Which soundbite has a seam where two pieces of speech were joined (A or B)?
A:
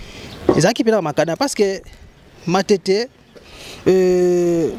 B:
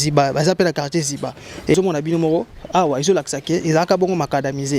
B